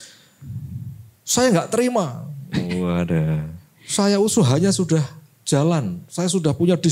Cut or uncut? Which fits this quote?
uncut